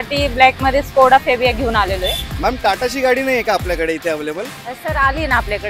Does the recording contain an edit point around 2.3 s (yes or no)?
yes